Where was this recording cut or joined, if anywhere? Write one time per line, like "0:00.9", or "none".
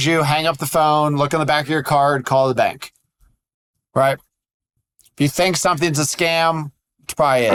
none